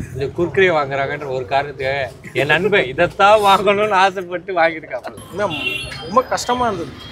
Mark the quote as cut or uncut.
cut